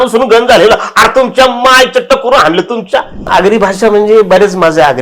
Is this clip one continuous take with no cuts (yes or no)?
no